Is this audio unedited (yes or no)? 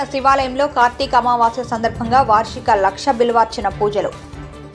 yes